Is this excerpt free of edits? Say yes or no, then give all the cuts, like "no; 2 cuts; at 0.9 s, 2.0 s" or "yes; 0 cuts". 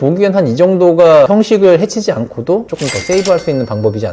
no; 2 cuts; at 1.3 s, 2.8 s